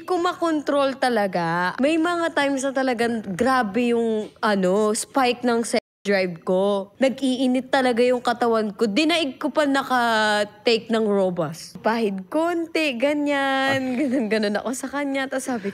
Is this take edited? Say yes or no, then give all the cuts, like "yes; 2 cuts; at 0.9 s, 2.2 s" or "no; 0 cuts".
yes; 3 cuts; at 1.7 s, 6.9 s, 11.8 s